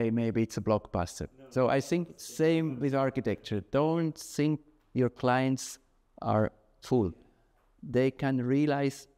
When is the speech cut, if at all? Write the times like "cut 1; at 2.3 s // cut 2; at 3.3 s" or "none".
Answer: none